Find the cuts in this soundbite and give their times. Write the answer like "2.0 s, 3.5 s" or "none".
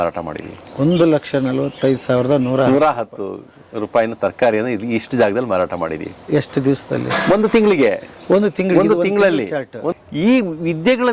9.8 s